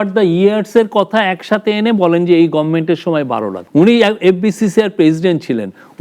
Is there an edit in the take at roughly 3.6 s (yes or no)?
yes